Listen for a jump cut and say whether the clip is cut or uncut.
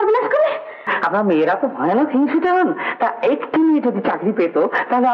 cut